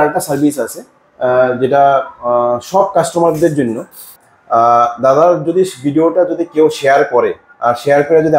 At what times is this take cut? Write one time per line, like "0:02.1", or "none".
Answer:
0:04.1

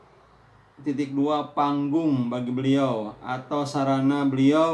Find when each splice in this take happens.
none

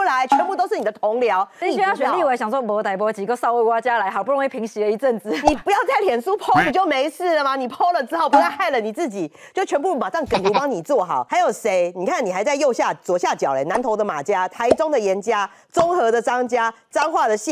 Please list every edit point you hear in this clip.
0:01.6
0:11.3

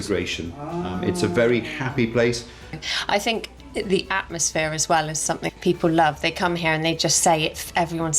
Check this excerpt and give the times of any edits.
0:02.8
0:05.5

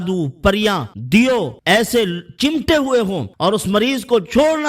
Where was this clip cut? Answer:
0:00.9
0:01.5
0:03.3

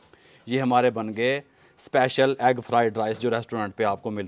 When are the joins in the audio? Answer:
none

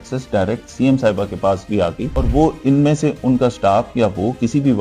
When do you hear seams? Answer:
0:02.1

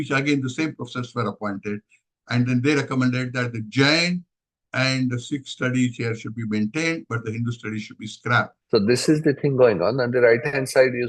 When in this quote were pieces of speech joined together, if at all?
0:08.6

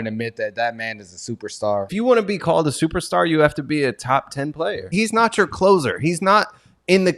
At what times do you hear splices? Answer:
0:01.9
0:04.8

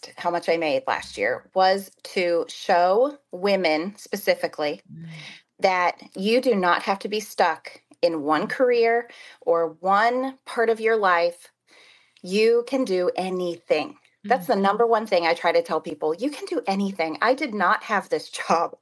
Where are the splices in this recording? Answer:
none

